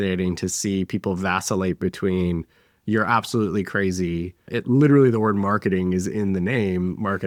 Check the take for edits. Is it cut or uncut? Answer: uncut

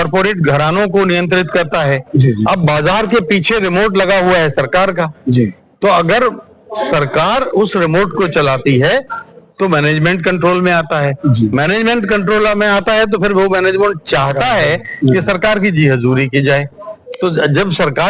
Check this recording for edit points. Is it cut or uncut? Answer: uncut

